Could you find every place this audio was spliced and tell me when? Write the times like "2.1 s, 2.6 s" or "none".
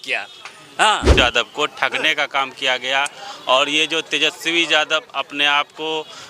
1.1 s